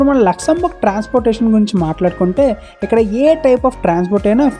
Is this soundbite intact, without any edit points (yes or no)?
yes